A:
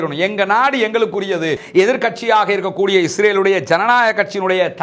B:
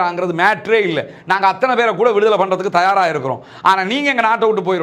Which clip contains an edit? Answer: A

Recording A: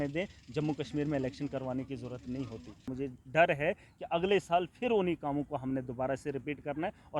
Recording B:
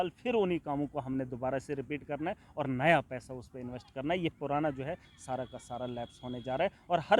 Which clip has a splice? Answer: A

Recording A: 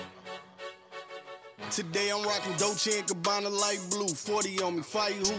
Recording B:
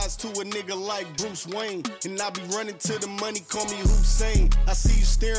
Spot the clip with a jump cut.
A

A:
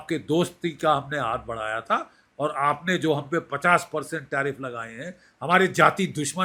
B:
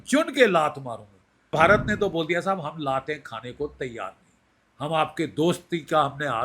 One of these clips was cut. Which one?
B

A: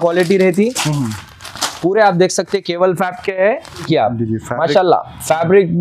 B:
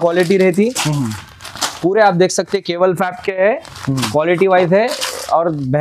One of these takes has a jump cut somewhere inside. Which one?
A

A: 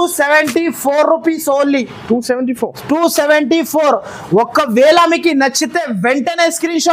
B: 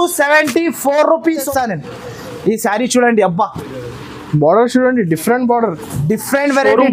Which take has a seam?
B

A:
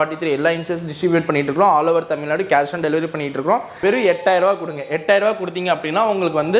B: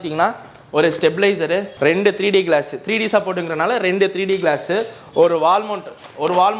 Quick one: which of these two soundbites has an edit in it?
A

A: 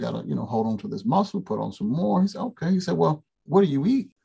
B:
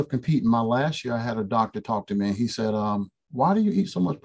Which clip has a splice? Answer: A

